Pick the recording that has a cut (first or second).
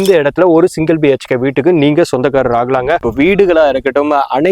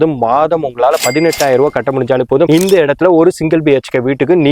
first